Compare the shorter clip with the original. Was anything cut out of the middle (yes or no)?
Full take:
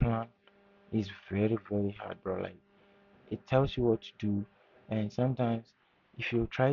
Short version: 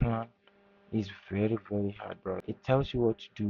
yes